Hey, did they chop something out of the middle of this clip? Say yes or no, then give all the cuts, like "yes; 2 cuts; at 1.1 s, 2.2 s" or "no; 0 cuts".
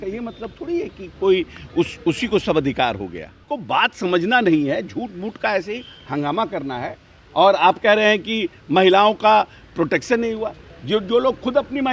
yes; 1 cut; at 3.5 s